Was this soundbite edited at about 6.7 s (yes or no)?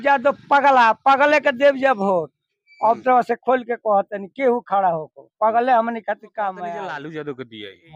yes